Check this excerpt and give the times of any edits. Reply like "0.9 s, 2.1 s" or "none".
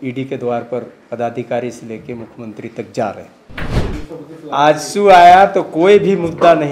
3.7 s